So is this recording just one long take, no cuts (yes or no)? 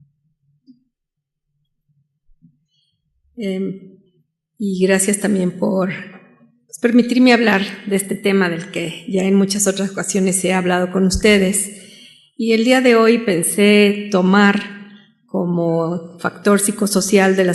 yes